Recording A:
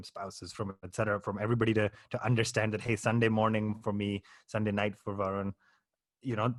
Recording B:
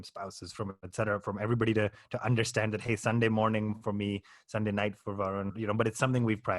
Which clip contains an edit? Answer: B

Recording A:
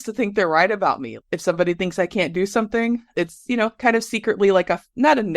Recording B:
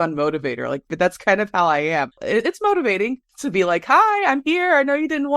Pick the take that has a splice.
A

